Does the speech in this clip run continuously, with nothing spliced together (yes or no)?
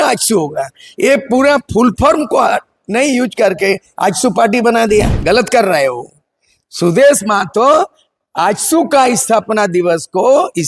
no